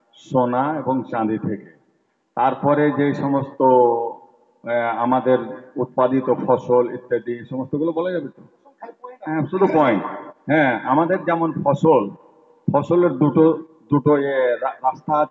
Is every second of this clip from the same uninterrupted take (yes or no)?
yes